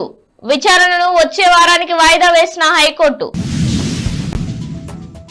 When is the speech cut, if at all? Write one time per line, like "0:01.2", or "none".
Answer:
0:04.3